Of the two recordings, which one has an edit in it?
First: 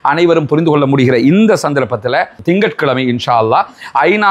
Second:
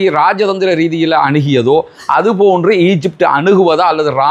first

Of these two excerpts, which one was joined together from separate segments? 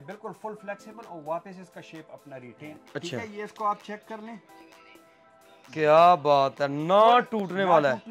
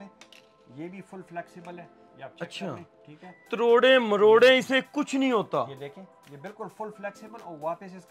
first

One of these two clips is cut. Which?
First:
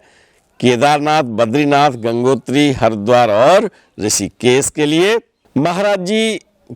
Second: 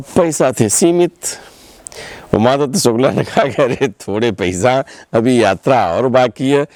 first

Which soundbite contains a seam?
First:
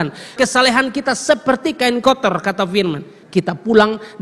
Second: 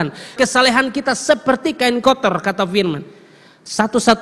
first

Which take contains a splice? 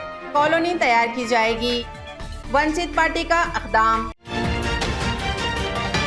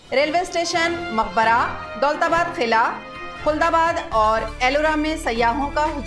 first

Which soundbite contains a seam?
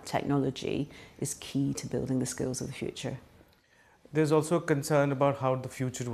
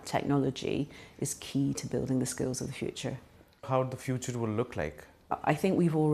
second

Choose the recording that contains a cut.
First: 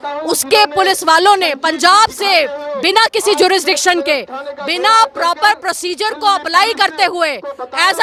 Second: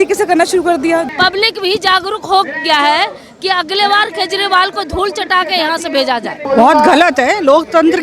second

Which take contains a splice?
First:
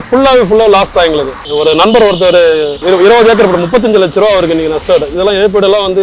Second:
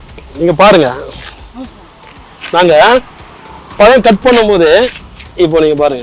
first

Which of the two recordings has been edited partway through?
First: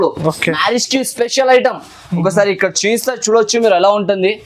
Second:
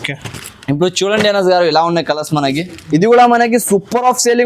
second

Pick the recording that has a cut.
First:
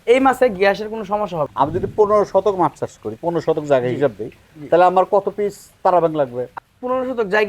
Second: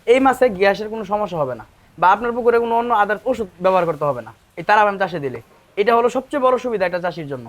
first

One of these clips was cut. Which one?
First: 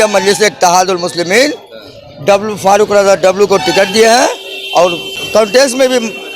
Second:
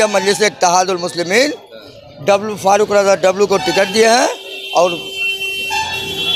first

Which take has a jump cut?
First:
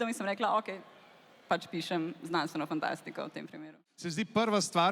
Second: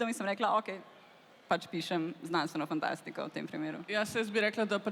first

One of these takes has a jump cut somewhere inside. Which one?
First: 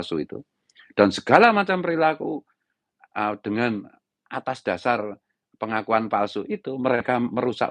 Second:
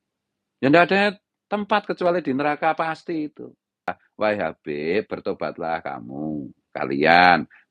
second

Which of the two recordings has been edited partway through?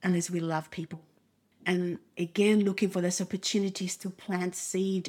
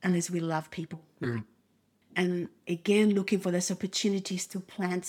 first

